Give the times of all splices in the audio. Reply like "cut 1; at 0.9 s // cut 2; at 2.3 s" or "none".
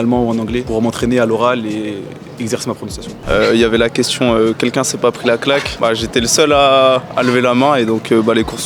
cut 1; at 3.2 s